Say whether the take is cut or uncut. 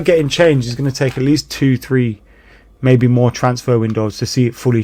uncut